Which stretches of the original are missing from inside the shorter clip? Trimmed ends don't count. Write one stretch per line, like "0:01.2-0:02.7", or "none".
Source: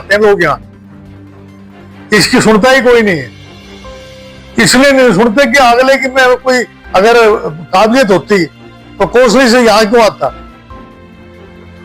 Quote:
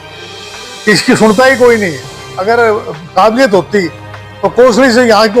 0:03.5-0:06.8